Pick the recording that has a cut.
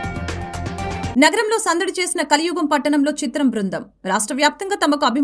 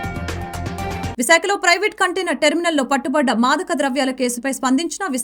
second; 1 cut; at 1.1 s

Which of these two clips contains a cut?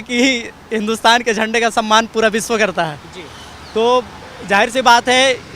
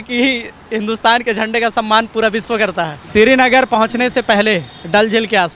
second; 1 cut; at 2.9 s

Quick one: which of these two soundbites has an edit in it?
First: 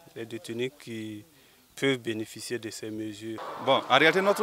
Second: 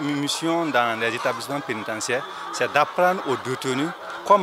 first; 1 cut; at 3.5 s

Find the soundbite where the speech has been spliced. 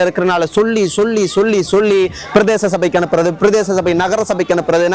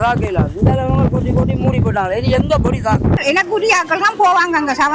second; 1 cut; at 3.2 s

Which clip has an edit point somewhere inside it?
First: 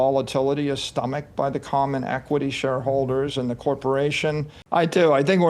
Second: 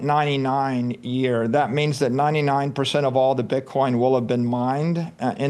first; 1 cut; at 4.5 s

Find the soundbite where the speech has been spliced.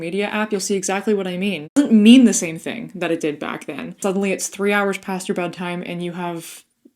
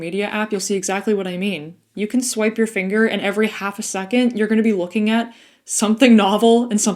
first; 2 cuts; at 1.8 s, 4.0 s

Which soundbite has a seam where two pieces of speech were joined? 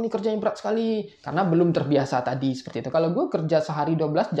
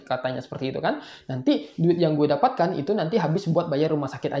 first; 1 cut; at 2.8 s

